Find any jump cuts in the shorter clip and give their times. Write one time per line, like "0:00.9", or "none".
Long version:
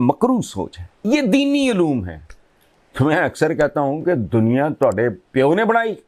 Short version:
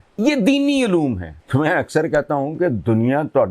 0:01.3